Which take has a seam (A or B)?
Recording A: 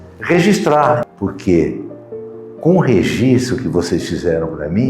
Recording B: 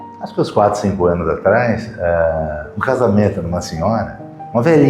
A